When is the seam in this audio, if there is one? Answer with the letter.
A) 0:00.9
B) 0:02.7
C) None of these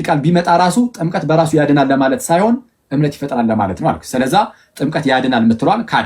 C